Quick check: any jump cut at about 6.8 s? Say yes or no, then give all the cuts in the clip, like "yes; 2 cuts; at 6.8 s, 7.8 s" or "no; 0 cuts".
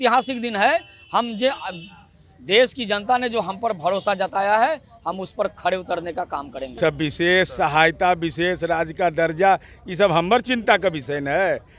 yes; 1 cut; at 6.8 s